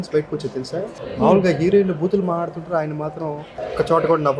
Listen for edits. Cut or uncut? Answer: cut